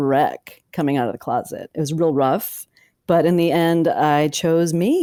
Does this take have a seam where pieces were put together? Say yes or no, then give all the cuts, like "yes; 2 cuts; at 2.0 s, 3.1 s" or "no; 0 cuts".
no; 0 cuts